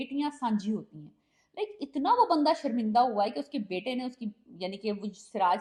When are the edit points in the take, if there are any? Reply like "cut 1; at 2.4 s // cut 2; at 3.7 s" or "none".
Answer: none